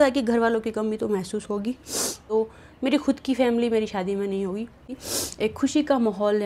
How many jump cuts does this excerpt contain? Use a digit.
2